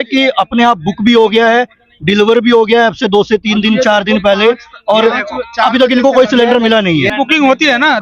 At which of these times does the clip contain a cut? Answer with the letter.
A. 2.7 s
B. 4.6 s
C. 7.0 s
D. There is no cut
C